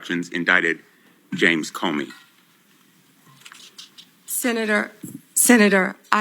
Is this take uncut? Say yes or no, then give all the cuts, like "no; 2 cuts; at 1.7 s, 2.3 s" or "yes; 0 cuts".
no; 1 cut; at 3.6 s